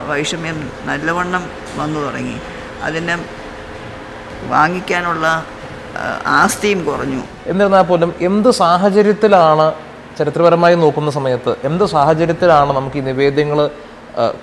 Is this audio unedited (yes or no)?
no